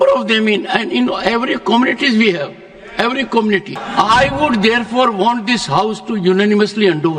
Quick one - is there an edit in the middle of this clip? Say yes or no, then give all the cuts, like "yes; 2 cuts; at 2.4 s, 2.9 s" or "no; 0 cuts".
yes; 1 cut; at 3.8 s